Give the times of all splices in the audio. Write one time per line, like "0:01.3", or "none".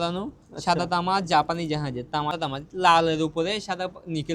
0:02.4